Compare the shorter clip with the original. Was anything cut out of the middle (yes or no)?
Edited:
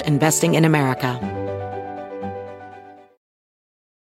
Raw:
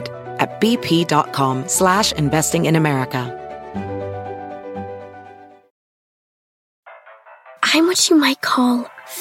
yes